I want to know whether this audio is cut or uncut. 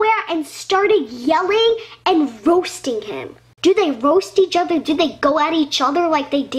cut